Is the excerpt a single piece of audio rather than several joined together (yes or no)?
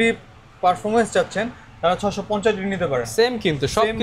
yes